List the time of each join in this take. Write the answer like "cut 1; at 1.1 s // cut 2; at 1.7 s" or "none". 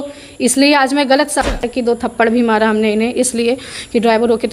cut 1; at 1.5 s